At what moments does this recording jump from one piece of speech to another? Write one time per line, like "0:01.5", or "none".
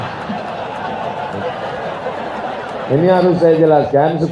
none